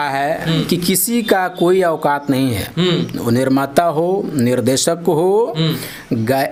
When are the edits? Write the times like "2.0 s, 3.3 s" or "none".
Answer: none